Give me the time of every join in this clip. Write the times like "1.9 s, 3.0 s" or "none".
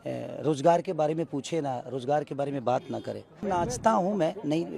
3.4 s